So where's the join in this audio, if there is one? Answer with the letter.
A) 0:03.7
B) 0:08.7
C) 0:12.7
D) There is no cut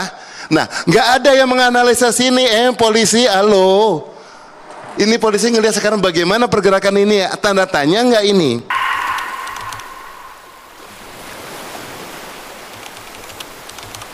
B